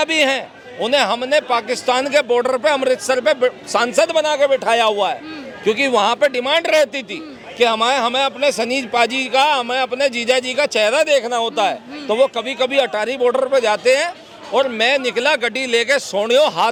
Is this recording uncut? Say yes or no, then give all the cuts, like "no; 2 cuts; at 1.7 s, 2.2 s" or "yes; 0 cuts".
yes; 0 cuts